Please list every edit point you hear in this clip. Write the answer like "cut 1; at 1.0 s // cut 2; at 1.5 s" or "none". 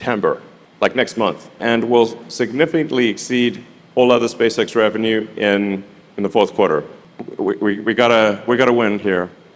cut 1; at 1.6 s // cut 2; at 7.0 s